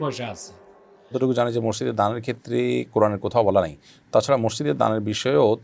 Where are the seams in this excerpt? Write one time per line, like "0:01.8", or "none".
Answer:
0:01.2